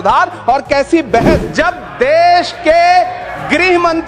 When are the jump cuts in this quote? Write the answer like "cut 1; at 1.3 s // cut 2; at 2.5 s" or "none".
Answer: cut 1; at 1.4 s